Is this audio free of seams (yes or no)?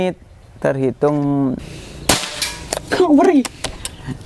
no